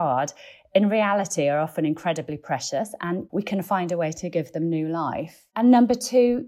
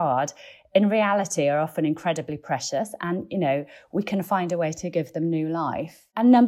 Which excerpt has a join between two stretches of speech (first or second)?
first